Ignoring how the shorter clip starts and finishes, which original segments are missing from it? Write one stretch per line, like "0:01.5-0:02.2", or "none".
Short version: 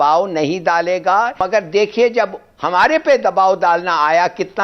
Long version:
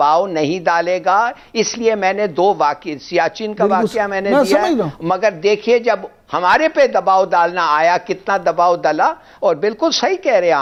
0:01.4-0:05.1